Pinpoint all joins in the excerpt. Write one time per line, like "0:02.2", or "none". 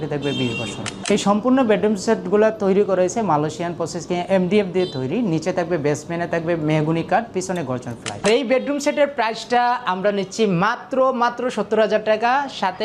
0:00.9
0:08.1